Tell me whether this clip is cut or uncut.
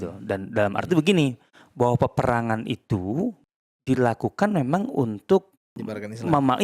cut